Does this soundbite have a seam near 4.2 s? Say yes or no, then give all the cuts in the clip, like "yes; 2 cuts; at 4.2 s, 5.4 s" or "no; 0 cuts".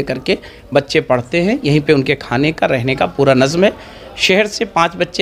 no; 0 cuts